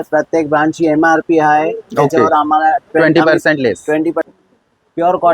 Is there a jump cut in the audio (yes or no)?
yes